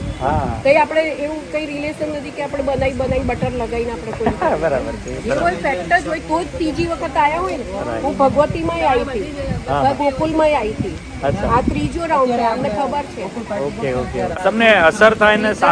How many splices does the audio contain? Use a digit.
1